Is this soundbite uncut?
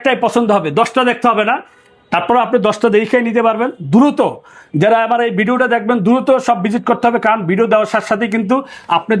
yes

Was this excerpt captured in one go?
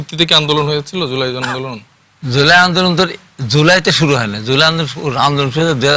yes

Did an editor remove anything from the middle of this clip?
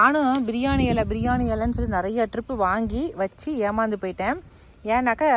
no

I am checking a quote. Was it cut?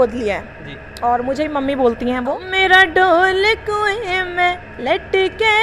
yes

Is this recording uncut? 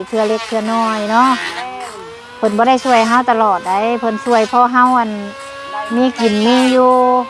yes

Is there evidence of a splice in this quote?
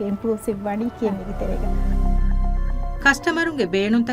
yes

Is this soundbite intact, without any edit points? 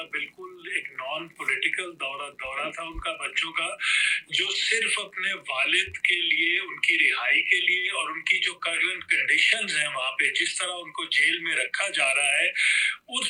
yes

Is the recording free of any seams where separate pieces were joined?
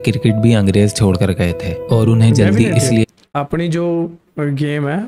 yes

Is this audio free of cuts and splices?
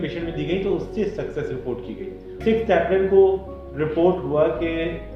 no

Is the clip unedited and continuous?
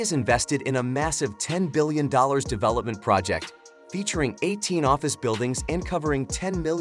yes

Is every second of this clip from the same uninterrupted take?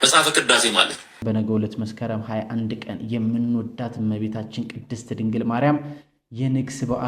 no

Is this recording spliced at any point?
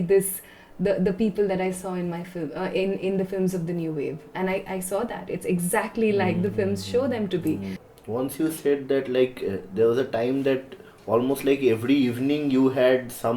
no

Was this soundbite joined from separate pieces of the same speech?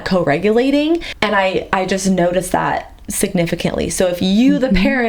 yes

